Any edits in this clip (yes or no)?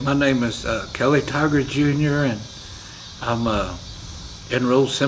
no